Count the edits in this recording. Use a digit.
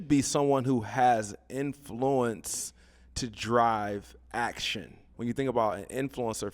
1